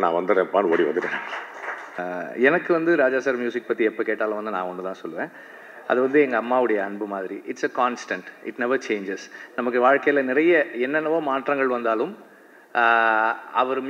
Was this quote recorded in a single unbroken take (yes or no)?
no